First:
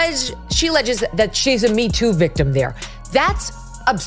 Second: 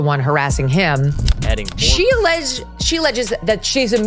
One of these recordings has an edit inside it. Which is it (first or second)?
second